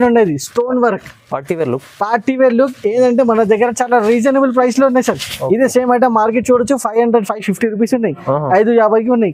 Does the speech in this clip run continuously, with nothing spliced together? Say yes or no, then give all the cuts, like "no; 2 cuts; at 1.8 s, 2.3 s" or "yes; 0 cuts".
yes; 0 cuts